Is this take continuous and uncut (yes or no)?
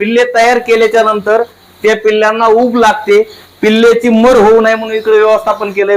yes